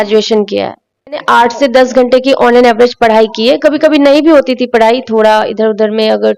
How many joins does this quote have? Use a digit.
1